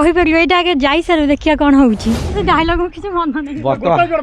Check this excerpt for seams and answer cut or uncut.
cut